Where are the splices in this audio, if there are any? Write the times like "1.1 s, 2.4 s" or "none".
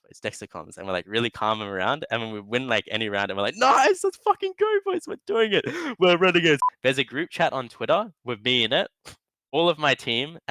6.6 s